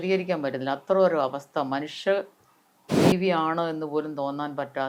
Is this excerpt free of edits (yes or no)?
yes